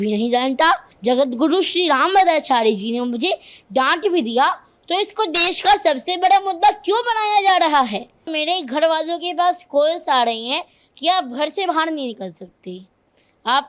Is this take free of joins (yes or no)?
no